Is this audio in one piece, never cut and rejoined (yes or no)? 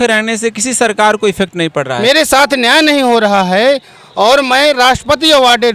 no